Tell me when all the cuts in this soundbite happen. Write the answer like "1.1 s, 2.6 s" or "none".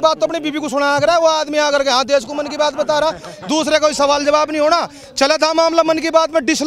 none